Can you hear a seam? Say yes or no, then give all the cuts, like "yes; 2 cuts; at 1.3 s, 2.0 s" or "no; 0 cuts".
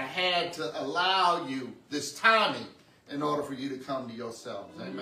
no; 0 cuts